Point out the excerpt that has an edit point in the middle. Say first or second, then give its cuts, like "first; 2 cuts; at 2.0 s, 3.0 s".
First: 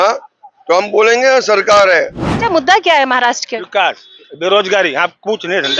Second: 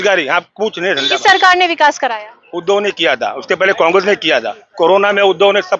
first; 1 cut; at 2.3 s